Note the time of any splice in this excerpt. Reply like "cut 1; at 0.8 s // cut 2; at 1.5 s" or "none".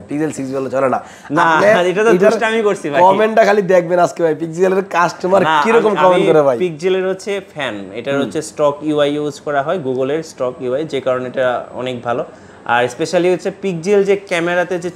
none